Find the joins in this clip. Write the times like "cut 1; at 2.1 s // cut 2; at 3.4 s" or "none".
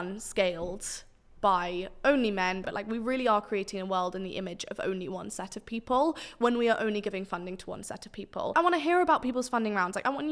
cut 1; at 2.7 s // cut 2; at 8.5 s